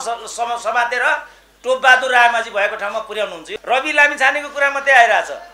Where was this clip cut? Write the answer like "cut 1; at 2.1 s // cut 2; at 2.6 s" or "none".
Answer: cut 1; at 3.4 s